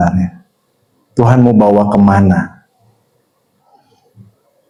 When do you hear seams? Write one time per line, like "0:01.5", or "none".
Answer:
none

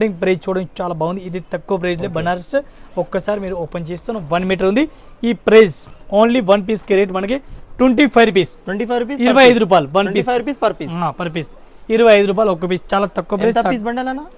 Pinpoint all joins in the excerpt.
none

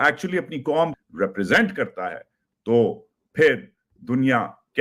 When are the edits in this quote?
0:01.0

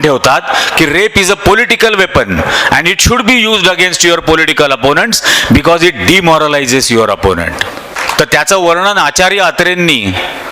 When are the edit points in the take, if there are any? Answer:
0:08.0

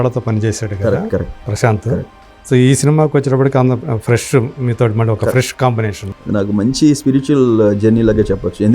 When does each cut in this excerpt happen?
0:06.0

